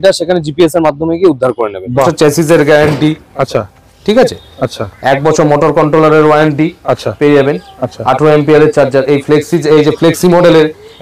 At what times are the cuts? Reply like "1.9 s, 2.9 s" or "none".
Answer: 2.1 s